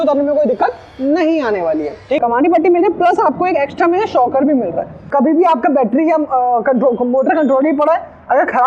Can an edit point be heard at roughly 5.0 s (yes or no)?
yes